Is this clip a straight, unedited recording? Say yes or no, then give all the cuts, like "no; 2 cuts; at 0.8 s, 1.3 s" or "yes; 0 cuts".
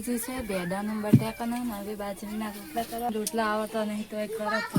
no; 1 cut; at 3.1 s